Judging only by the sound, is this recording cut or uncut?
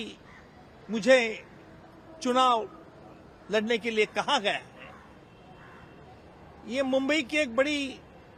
uncut